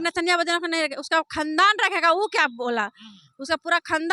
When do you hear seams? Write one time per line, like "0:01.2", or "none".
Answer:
none